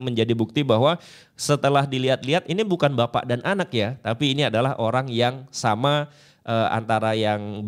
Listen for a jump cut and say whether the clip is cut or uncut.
uncut